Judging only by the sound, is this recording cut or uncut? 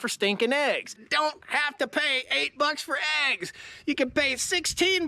cut